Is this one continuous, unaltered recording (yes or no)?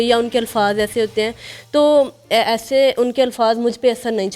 yes